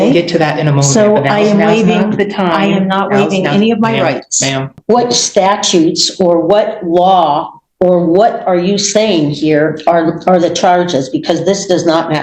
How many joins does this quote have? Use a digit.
1